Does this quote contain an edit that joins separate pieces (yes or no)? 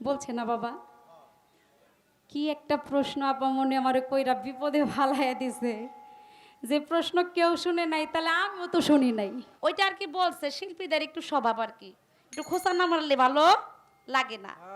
yes